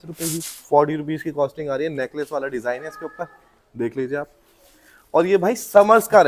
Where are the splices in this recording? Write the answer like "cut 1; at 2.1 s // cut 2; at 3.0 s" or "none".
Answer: none

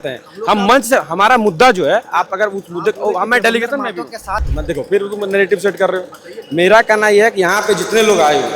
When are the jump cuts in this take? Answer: cut 1; at 4.5 s

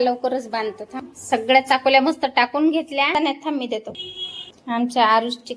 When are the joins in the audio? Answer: cut 1; at 3.1 s

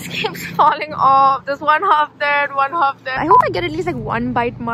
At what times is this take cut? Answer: cut 1; at 3.2 s

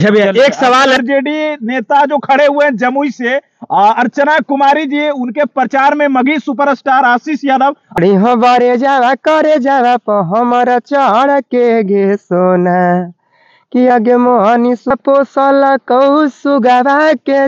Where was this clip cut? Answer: cut 1; at 1.0 s // cut 2; at 8.0 s // cut 3; at 14.9 s

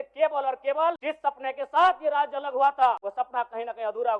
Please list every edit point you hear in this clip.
cut 1; at 1.0 s // cut 2; at 3.0 s

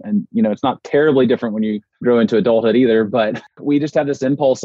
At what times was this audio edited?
cut 1; at 1.9 s // cut 2; at 3.4 s

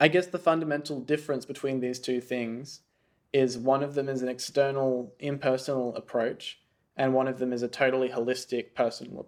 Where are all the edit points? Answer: none

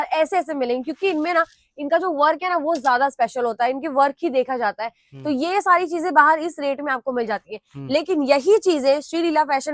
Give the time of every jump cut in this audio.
none

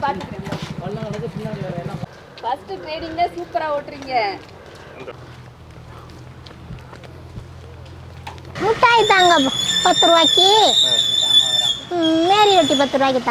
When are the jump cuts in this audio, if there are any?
cut 1; at 2.1 s // cut 2; at 5.1 s // cut 3; at 8.5 s

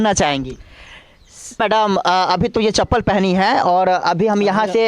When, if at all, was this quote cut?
cut 1; at 1.6 s

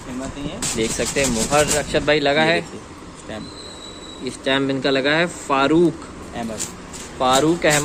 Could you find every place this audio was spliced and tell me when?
none

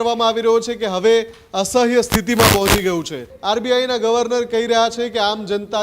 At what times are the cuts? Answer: cut 1; at 3.3 s

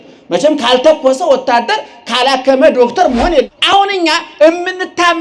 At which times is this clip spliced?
cut 1; at 3.5 s

